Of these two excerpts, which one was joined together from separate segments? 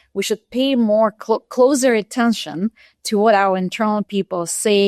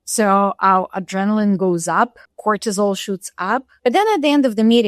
second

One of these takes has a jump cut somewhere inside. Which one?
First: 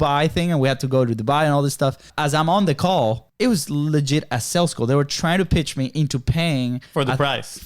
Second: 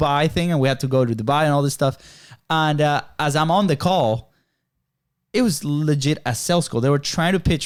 first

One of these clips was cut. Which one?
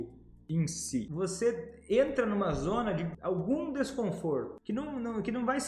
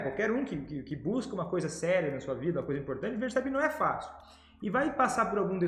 first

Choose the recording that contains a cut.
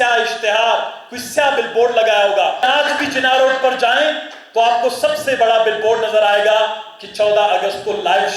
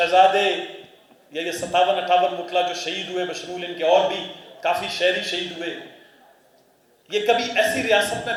first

